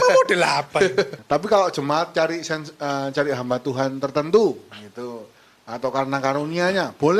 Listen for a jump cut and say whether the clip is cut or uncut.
cut